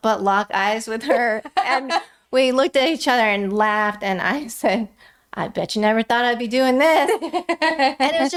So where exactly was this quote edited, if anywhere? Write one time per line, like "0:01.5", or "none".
none